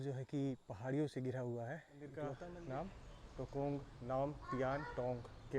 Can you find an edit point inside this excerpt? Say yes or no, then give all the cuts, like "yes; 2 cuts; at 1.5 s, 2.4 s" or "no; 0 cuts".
yes; 1 cut; at 2.4 s